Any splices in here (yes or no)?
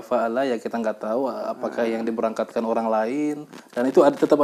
no